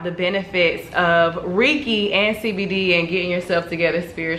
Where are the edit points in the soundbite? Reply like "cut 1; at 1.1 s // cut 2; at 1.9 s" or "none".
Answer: none